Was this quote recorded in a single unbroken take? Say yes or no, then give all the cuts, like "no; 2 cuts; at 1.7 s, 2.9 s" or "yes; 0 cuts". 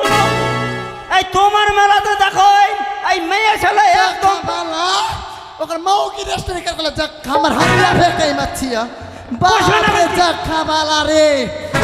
yes; 0 cuts